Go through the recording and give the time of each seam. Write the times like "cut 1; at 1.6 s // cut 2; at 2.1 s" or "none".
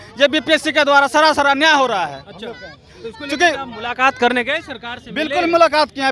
none